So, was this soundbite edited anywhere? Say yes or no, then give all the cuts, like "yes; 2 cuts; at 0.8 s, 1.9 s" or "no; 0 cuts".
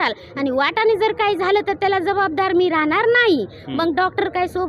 no; 0 cuts